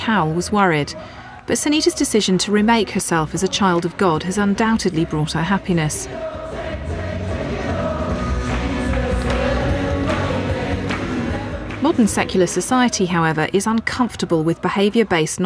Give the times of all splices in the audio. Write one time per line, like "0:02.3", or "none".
none